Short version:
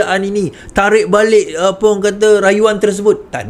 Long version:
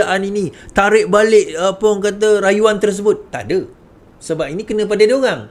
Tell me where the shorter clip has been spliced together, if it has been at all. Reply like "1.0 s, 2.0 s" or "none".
none